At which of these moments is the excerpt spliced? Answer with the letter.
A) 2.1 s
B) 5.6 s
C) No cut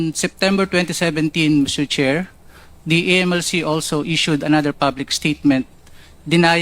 A